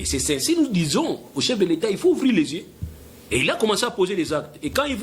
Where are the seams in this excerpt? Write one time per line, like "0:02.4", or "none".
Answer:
none